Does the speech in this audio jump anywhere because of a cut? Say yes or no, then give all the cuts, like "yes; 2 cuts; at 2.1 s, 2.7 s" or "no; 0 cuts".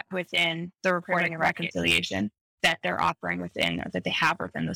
yes; 2 cuts; at 1.5 s, 2.6 s